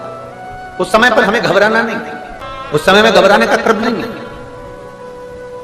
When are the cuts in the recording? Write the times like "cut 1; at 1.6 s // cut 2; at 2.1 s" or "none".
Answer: none